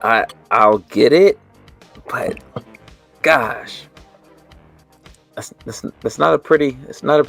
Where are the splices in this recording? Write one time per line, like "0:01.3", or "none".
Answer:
none